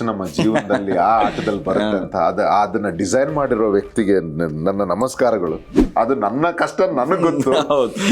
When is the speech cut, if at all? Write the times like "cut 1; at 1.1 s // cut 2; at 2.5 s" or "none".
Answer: cut 1; at 5.7 s